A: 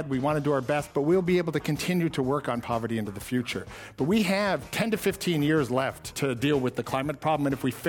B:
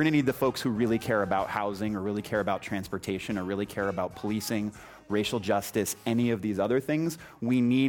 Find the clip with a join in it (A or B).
A